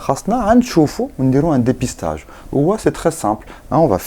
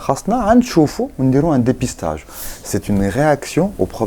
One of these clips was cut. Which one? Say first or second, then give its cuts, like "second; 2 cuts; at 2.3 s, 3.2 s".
second; 1 cut; at 2.3 s